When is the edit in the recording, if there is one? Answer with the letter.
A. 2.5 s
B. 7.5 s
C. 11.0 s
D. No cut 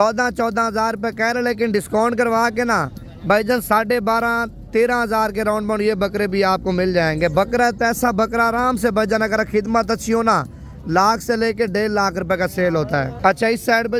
D